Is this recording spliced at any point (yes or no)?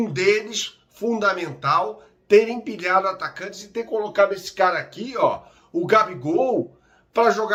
no